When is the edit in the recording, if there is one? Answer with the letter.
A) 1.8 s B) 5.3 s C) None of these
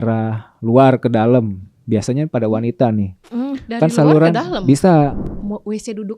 B